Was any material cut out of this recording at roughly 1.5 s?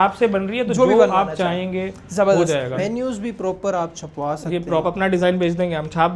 no; 2 cuts; at 2.8 s, 4.8 s

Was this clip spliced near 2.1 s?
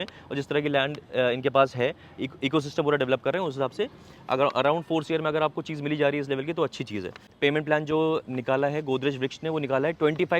no; 1 cut; at 7.2 s

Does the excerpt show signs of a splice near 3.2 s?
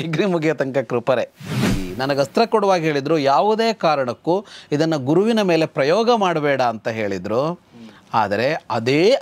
no; 1 cut; at 1.7 s

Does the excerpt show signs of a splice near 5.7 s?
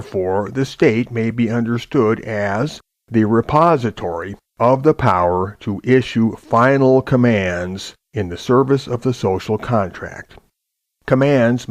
yes; 1 cut; at 5.7 s

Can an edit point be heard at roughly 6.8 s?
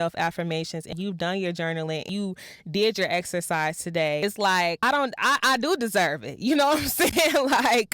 no; 3 cuts; at 0.9 s, 2.1 s, 4.4 s

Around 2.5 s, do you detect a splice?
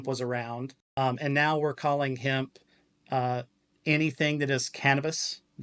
no; 1 cut; at 1.2 s

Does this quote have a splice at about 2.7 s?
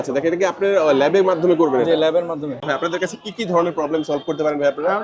yes; 1 cut; at 2.7 s

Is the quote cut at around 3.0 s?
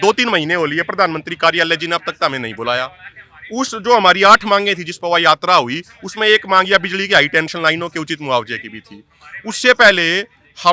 no; 0 cuts

